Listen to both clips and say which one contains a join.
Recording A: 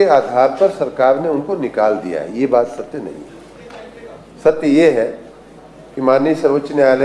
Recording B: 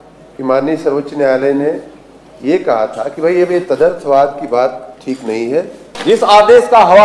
B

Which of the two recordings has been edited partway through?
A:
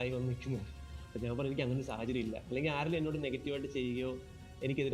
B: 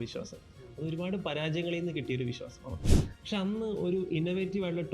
B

